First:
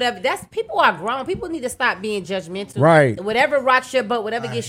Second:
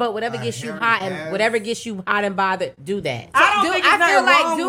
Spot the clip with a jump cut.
second; 1 cut; at 3.3 s

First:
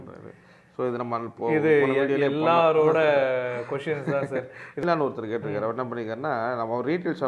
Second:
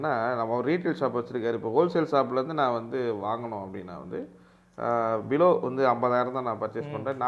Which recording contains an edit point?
first; 1 cut; at 4.8 s

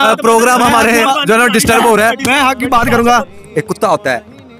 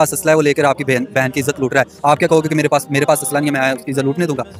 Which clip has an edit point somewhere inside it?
first; 1 cut; at 3.3 s

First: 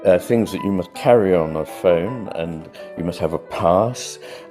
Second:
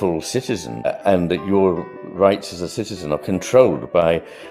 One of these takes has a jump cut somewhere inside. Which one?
second; 1 cut; at 0.9 s

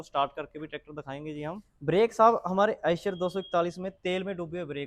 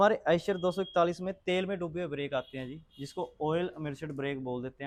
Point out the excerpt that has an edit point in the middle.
first; 1 cut; at 1.7 s

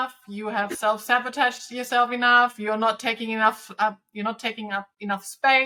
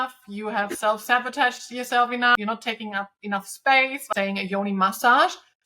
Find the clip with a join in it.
second; 2 cuts; at 2.3 s, 4.1 s

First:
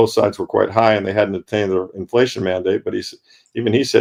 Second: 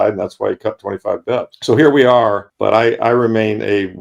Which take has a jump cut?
second; 2 cuts; at 1.5 s, 2.5 s

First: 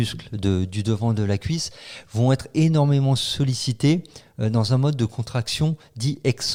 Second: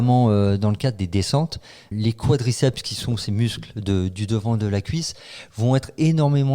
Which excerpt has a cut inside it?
second; 1 cut; at 1.9 s

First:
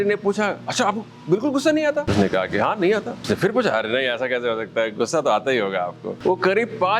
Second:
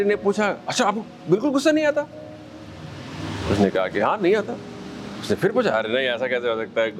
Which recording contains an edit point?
first; 3 cuts; at 2.1 s, 3.1 s, 6.1 s

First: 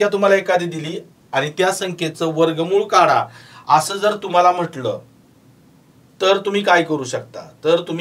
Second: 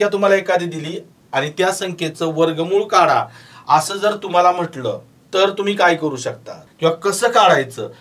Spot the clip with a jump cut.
second; 2 cuts; at 5.1 s, 6.6 s

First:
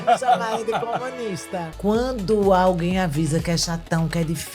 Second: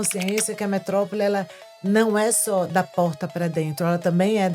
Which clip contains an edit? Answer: first; 1 cut; at 1.7 s

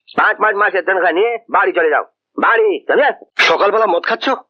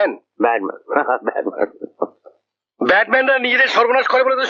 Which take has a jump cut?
first; 1 cut; at 3.3 s

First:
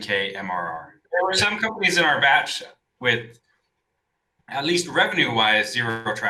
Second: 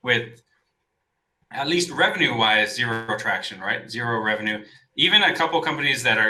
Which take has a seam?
first; 1 cut; at 1.0 s

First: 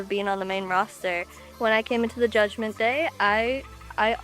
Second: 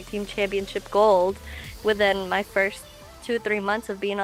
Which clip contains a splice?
first; 1 cut; at 1.4 s

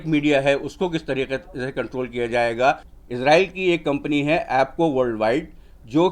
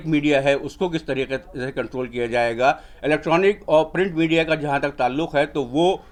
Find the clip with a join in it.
first; 1 cut; at 2.9 s

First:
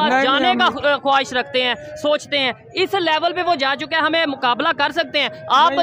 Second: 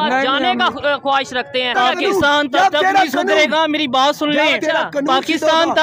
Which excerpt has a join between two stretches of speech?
second; 1 cut; at 1.7 s

